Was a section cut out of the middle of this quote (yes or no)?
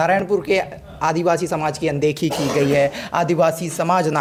no